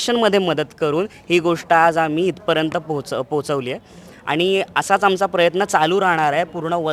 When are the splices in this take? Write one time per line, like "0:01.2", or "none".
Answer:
none